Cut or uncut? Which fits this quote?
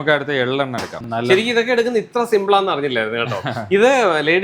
cut